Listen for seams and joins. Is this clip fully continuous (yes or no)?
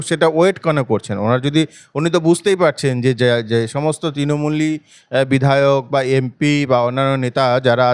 yes